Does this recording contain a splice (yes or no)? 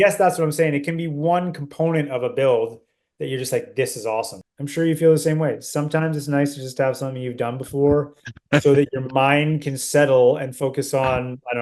yes